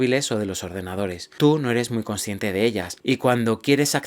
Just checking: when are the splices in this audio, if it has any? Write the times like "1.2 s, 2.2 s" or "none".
1.2 s, 2.9 s